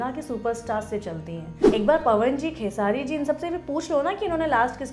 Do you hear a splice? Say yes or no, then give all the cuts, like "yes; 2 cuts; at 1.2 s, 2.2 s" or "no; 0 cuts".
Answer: yes; 1 cut; at 1.6 s